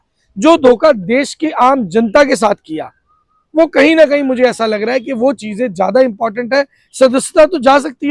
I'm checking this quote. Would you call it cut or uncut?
uncut